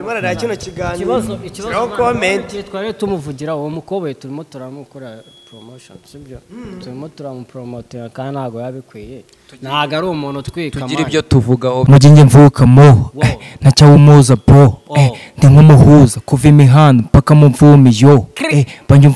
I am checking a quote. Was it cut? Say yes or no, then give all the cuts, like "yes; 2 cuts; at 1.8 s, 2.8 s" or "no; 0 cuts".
yes; 1 cut; at 11.8 s